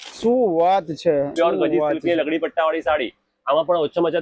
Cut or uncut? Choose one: cut